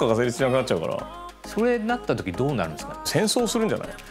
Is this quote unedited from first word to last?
no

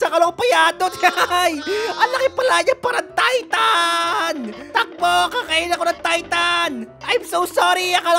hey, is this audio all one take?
yes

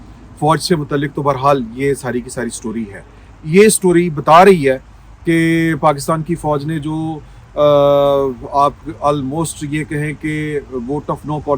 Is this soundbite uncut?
yes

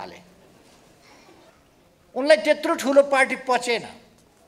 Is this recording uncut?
no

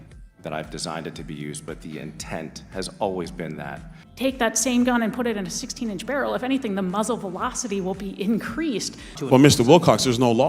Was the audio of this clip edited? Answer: yes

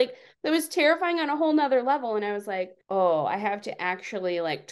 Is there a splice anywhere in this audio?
no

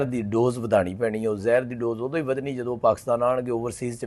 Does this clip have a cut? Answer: no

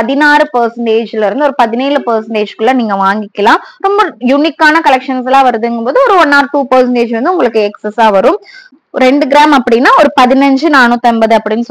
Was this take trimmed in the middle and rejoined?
no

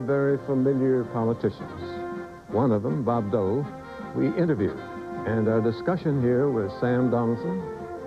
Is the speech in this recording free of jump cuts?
yes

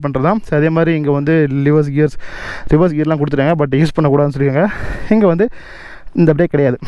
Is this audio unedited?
yes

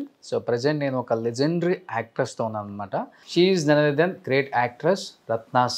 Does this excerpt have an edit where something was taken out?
yes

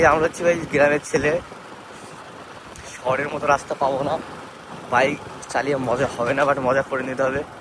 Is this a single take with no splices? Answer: yes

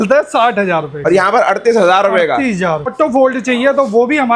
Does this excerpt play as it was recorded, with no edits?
no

